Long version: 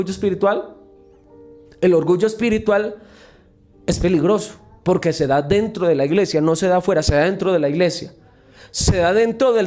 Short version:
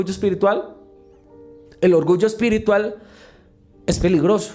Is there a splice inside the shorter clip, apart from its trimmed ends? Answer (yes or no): no